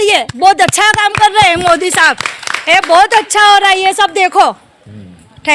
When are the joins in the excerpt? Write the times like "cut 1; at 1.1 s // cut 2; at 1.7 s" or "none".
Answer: none